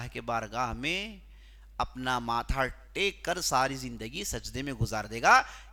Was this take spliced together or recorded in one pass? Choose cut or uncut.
uncut